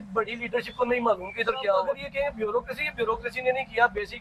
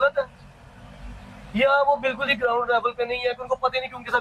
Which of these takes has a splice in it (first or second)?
first